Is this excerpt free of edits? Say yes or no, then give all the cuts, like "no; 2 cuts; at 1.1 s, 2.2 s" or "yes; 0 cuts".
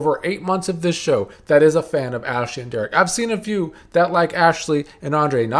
yes; 0 cuts